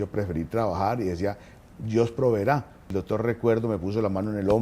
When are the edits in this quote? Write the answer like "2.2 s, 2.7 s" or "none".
2.9 s